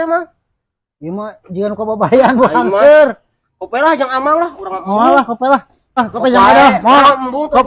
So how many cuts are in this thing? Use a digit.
0